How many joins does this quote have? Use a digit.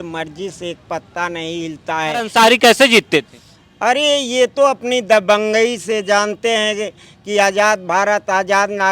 1